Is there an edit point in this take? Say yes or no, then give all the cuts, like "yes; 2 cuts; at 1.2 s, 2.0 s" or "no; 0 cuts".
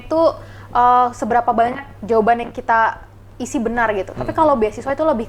no; 0 cuts